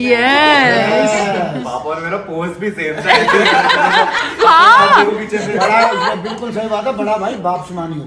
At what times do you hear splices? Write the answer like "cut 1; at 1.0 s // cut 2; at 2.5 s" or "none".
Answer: none